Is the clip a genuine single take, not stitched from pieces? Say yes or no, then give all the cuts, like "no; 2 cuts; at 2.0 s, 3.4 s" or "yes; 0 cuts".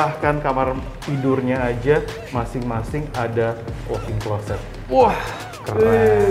yes; 0 cuts